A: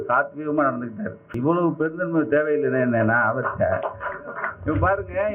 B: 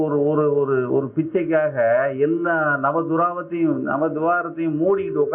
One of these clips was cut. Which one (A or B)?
A